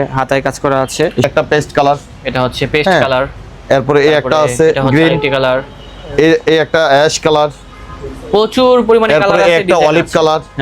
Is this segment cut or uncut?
cut